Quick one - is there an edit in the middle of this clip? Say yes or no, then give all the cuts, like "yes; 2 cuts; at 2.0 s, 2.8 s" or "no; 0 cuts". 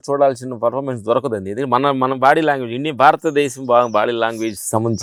no; 0 cuts